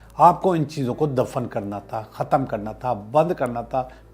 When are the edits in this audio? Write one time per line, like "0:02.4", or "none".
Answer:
none